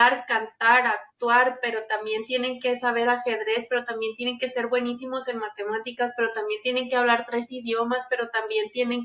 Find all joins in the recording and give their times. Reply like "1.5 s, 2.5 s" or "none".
none